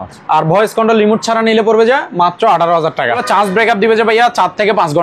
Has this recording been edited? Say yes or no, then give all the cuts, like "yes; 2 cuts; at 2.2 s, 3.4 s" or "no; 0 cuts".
yes; 1 cut; at 3.2 s